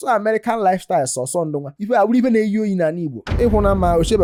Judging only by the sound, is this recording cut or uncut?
uncut